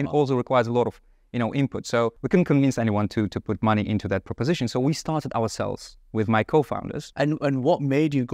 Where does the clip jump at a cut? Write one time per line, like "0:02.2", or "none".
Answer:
none